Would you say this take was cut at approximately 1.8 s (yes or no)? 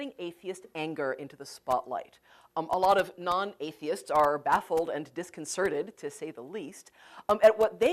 yes